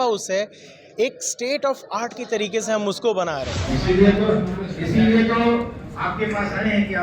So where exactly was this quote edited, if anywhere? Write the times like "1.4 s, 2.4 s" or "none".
3.6 s